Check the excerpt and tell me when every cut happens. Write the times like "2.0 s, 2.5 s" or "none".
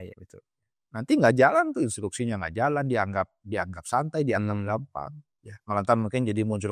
none

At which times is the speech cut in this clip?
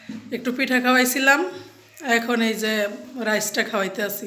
none

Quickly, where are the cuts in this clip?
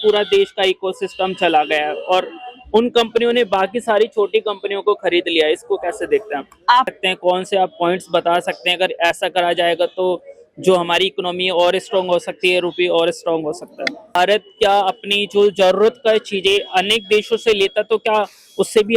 6.9 s, 14.2 s

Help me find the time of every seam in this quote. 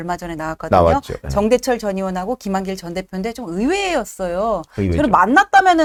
none

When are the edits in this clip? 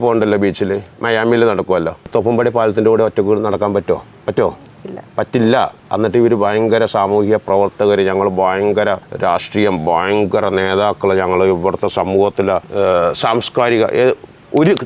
2.1 s, 4.1 s, 5.8 s, 9.1 s, 12.7 s

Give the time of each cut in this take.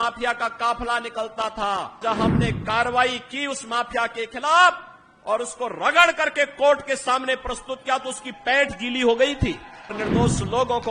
2.0 s, 9.9 s

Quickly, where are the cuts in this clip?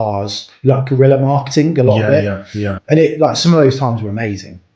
2.8 s

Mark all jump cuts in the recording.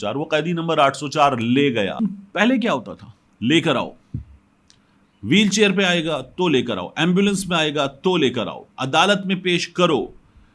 2.0 s

